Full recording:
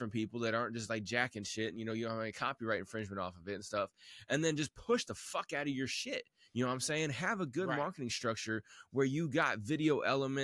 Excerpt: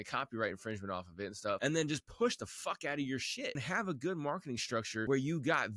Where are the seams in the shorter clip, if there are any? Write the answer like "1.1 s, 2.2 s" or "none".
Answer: 1.6 s, 3.6 s, 5.0 s